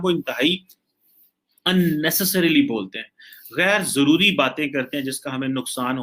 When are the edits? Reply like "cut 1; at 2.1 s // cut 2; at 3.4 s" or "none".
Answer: none